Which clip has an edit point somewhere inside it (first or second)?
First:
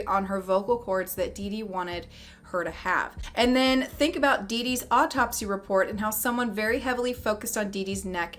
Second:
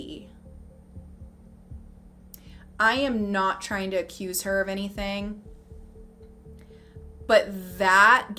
first